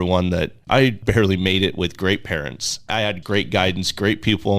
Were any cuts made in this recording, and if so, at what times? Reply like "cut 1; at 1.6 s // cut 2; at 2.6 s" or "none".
cut 1; at 3.1 s